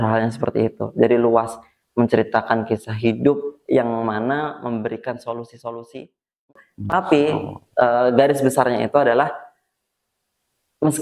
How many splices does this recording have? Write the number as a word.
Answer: one